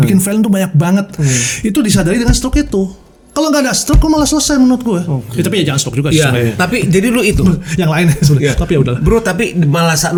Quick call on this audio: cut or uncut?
uncut